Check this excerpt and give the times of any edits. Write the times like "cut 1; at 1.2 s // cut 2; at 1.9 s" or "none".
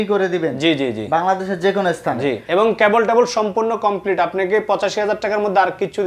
none